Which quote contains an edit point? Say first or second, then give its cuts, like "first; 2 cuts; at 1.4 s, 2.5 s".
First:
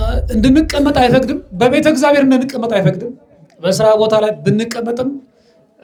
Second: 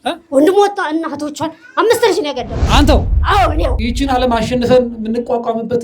second; 1 cut; at 3.8 s